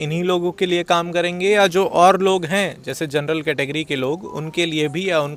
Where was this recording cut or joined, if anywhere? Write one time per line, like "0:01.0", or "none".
none